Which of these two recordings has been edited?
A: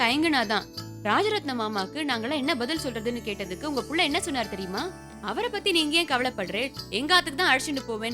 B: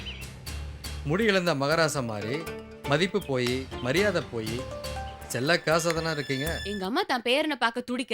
B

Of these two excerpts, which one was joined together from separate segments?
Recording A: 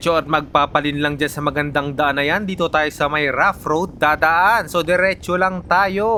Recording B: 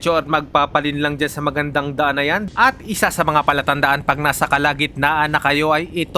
B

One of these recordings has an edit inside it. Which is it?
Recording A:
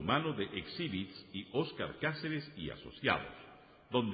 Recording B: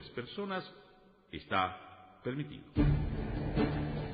B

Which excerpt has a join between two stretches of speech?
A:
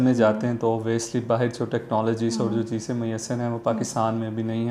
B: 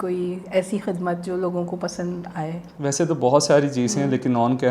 B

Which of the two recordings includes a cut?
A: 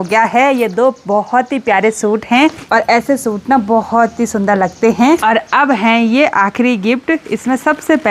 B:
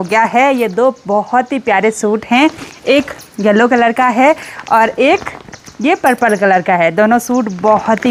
A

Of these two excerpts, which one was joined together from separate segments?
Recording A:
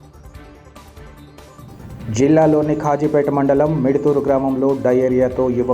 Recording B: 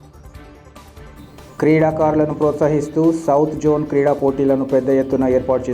B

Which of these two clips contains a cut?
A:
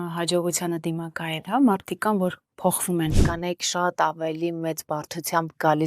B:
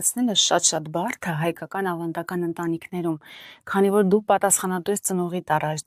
A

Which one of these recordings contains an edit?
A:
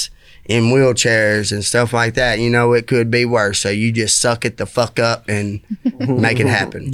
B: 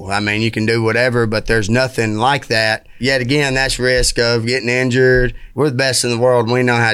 B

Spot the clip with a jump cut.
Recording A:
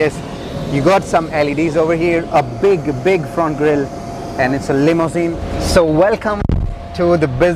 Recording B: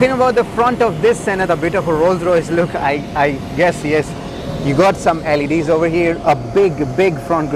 A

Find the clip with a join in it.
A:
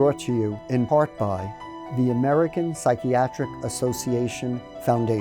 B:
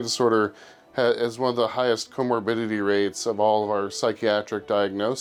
A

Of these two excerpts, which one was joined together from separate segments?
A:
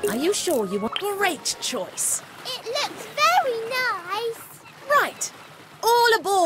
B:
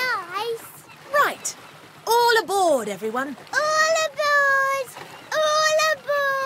A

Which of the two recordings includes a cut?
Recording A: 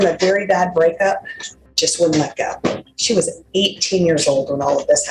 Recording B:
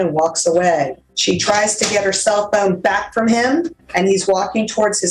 B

